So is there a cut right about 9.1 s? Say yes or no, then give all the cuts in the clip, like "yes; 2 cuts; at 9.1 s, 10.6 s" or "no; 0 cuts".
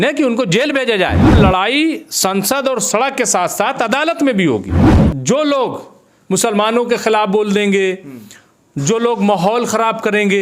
no; 2 cuts; at 1.3 s, 5.0 s